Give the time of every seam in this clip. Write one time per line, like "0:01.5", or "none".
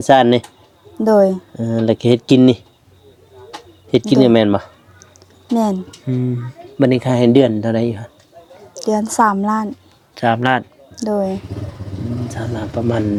none